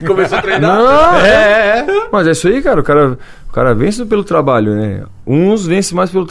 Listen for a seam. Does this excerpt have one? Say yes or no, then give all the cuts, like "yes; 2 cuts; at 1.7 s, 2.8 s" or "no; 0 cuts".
no; 0 cuts